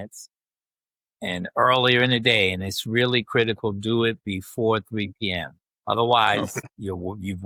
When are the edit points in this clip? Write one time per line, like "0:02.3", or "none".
none

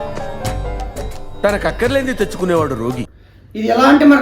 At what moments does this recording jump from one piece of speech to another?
0:03.1

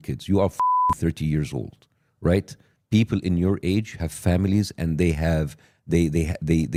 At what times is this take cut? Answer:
none

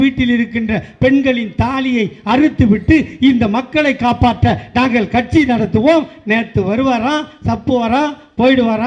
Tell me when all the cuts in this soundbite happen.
none

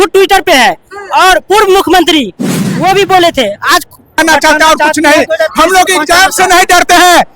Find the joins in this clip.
0:04.2

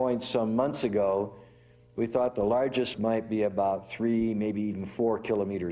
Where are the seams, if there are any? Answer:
0:02.9

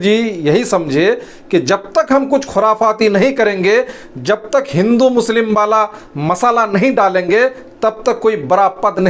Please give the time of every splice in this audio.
none

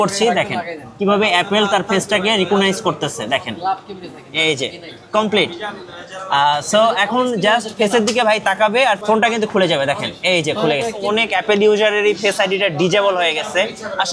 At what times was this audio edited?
0:11.0

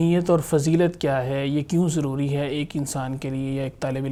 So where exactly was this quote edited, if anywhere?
none

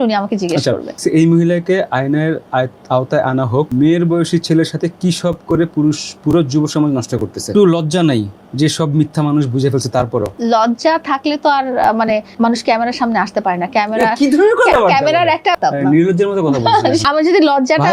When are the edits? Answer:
0:01.0
0:03.7
0:07.5
0:10.3
0:12.3
0:15.6
0:17.0

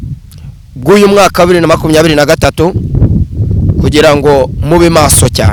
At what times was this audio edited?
none

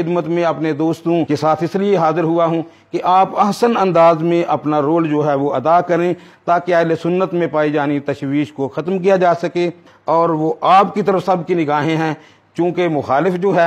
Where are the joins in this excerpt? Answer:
0:01.3

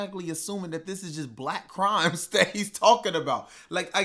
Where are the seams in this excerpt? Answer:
none

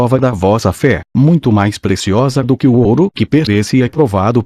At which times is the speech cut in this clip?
none

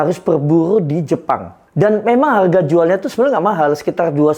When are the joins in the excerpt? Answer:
0:01.6

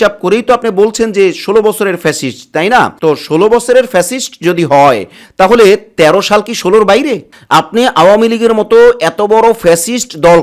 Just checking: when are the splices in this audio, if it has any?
0:07.3

